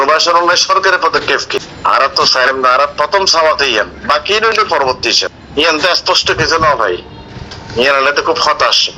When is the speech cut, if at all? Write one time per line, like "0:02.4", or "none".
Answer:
0:01.7
0:05.4